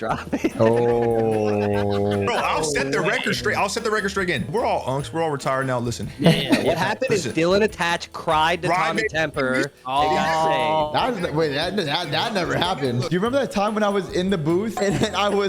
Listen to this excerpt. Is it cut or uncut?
cut